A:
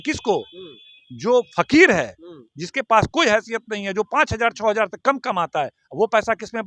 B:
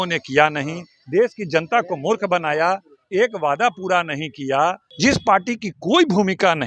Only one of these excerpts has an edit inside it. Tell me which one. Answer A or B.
B